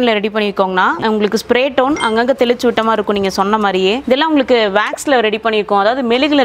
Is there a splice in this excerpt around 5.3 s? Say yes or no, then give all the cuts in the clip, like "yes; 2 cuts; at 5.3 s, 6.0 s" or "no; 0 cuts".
no; 2 cuts; at 1.0 s, 4.0 s